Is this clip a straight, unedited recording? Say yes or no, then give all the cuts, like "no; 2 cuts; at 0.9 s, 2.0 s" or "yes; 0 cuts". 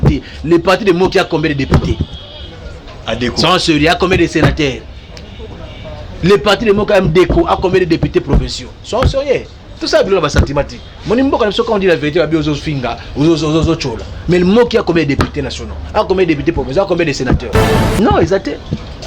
no; 1 cut; at 18.0 s